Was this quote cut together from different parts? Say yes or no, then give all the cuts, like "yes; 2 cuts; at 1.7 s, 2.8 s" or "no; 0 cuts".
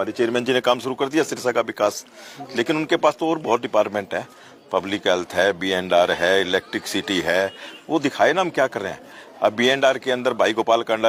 no; 0 cuts